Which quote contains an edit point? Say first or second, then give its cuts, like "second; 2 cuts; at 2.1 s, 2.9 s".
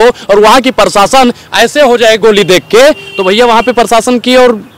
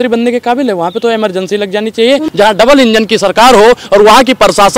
second; 1 cut; at 2.3 s